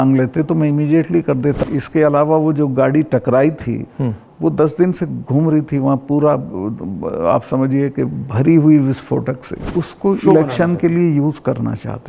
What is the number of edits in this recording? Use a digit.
2